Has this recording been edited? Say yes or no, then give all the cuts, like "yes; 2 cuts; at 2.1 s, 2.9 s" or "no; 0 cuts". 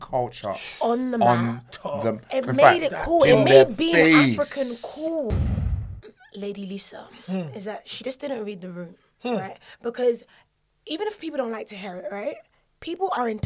yes; 1 cut; at 5.7 s